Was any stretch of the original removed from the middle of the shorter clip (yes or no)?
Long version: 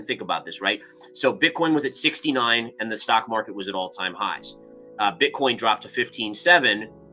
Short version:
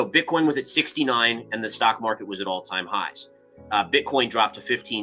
no